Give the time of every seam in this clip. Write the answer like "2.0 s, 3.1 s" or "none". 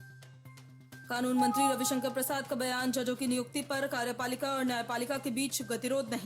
1.0 s